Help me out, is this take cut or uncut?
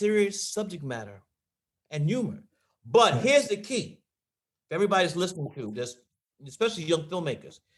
uncut